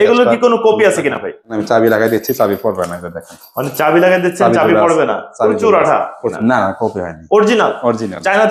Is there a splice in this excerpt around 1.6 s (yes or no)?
yes